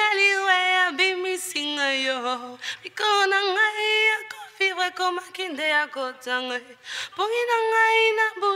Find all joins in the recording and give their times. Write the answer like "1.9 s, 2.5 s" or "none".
none